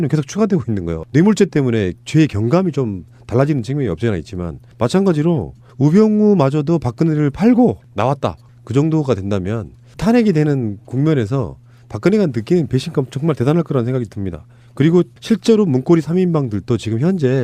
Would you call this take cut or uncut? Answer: cut